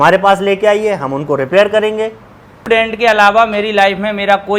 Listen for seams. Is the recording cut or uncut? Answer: cut